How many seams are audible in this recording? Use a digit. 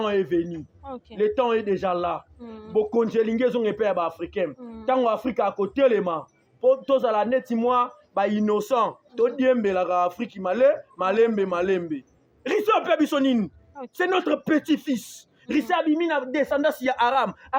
0